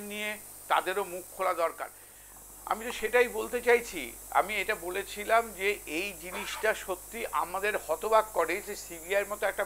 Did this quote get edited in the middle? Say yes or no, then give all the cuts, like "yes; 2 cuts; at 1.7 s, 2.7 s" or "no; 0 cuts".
yes; 1 cut; at 2.2 s